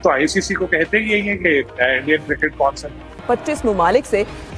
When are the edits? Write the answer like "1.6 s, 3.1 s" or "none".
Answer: 3.1 s